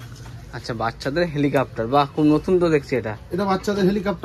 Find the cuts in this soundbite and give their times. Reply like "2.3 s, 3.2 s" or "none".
none